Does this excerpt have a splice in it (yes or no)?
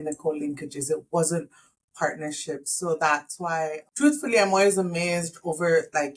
yes